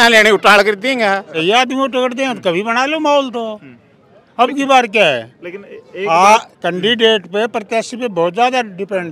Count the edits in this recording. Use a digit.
1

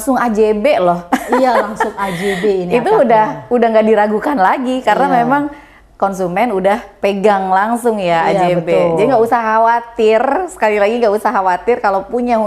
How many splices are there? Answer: 0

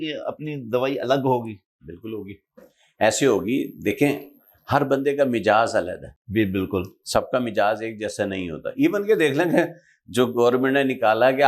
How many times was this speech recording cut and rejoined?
0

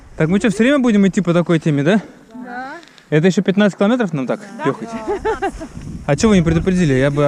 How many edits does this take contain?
0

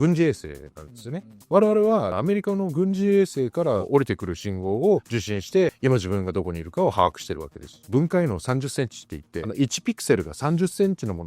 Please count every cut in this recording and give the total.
4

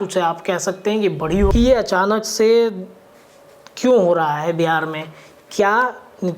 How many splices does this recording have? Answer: 1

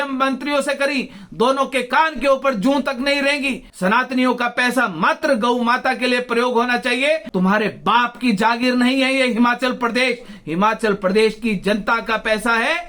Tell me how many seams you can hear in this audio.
2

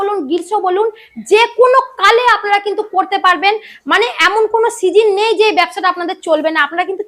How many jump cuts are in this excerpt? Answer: 0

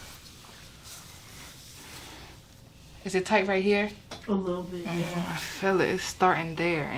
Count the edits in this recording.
0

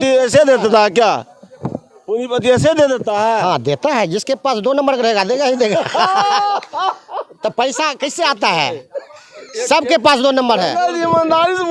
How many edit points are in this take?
0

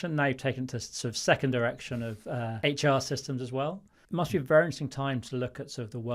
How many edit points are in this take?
2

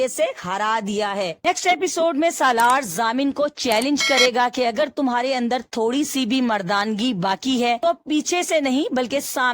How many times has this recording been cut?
1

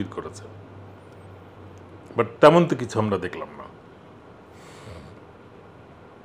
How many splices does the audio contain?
0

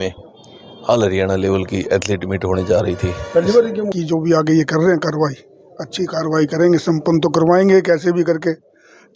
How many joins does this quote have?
1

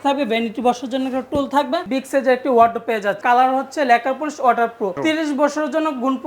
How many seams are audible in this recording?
3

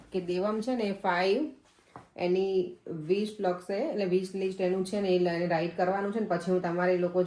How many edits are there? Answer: 0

